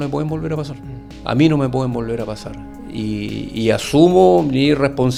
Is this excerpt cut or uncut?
uncut